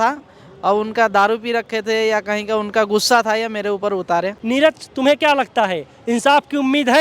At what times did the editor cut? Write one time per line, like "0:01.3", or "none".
0:04.1